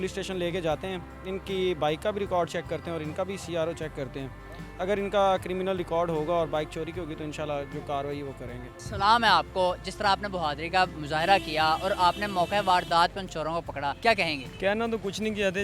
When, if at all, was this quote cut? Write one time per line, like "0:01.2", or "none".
none